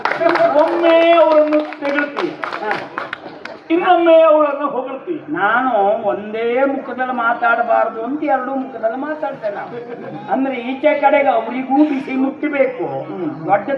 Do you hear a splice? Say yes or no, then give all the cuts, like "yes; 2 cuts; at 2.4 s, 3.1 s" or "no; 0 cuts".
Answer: no; 0 cuts